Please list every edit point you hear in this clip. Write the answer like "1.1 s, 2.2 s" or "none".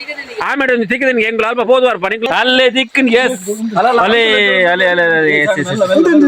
2.3 s

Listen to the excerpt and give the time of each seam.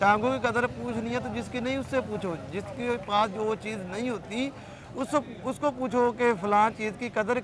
none

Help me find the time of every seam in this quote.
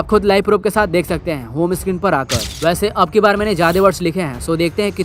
2.4 s

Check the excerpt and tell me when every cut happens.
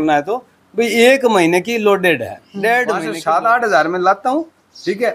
3.1 s

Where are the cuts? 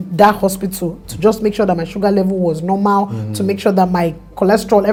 none

